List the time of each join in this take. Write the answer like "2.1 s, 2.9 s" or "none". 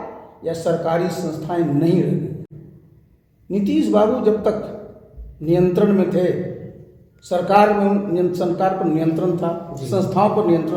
none